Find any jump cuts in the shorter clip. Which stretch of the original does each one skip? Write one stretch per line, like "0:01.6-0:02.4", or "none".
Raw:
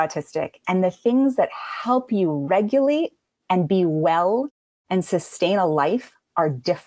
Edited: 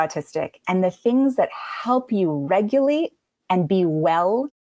none